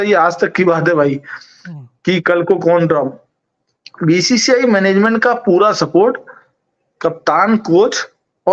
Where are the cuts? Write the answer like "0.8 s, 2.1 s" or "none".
none